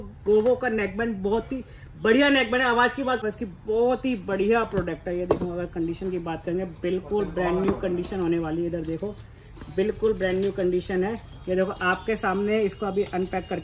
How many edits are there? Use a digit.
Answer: 1